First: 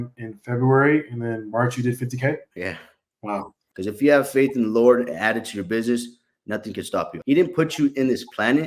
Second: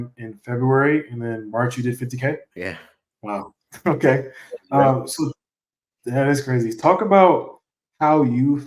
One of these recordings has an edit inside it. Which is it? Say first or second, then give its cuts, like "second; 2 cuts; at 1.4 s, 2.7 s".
first; 2 cuts; at 3.6 s, 7.1 s